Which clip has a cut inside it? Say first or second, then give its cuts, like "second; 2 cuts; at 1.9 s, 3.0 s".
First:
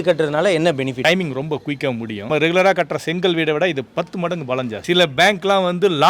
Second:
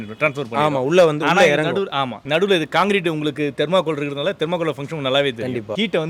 first; 3 cuts; at 1.0 s, 2.3 s, 4.8 s